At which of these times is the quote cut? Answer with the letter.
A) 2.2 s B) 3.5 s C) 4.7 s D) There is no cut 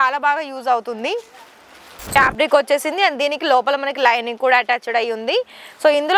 A